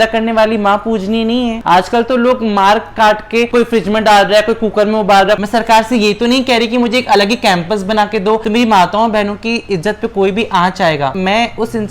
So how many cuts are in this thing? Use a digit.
3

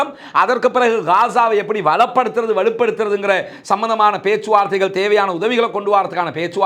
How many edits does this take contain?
0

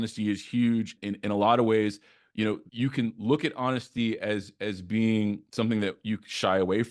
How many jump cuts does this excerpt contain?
2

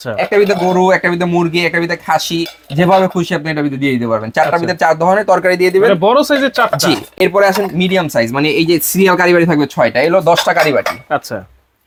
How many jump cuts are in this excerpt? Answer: 0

